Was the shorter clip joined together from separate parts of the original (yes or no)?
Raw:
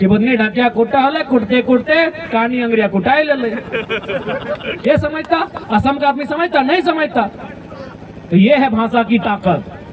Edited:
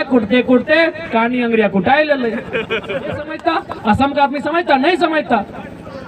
yes